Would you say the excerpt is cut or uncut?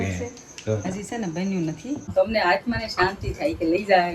cut